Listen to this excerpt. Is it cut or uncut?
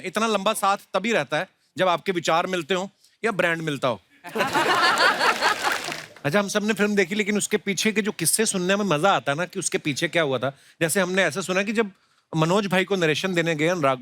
cut